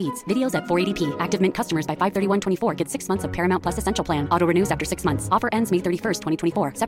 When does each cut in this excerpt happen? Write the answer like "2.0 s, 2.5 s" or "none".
none